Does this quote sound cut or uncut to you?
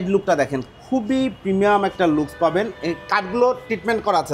uncut